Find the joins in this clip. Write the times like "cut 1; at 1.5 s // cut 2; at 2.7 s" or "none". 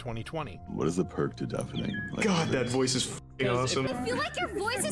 cut 1; at 3.9 s